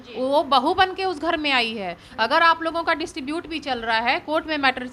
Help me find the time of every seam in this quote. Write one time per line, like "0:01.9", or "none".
none